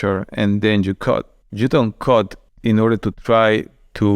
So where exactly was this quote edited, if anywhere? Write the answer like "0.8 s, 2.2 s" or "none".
2.4 s